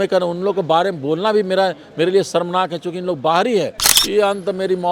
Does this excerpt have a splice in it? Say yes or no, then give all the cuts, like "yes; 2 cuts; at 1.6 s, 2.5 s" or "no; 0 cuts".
yes; 1 cut; at 3.8 s